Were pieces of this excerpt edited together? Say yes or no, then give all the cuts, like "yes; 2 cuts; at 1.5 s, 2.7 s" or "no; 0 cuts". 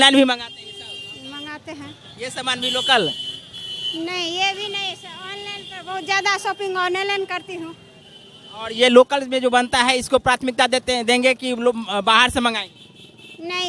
no; 0 cuts